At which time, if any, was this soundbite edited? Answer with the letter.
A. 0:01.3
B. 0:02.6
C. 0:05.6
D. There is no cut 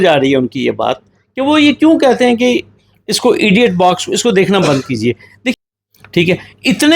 C